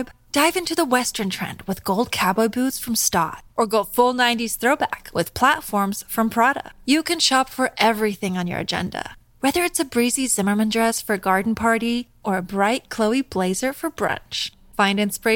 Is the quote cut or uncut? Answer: uncut